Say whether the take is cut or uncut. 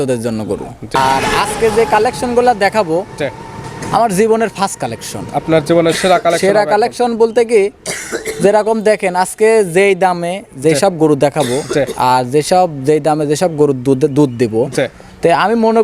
cut